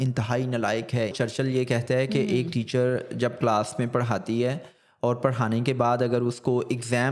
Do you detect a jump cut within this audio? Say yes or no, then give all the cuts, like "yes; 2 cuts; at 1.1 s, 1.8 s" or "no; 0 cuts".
yes; 1 cut; at 1.1 s